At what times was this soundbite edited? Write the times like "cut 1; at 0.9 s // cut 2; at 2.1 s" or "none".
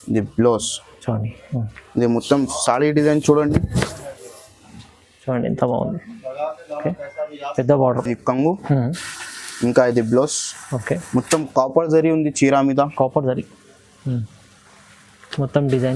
cut 1; at 8.0 s